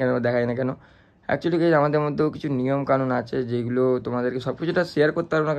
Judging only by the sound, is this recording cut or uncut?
uncut